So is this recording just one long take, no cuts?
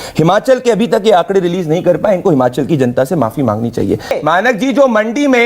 no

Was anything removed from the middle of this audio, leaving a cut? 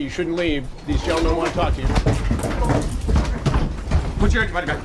no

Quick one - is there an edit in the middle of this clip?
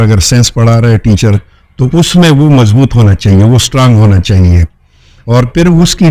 no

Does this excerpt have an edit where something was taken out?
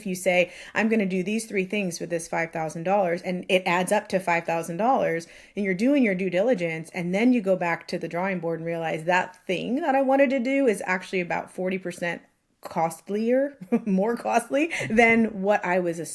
no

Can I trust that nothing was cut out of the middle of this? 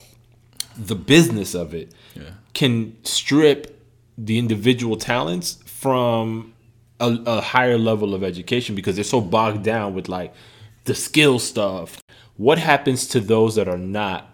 no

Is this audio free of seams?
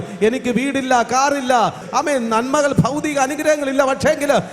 no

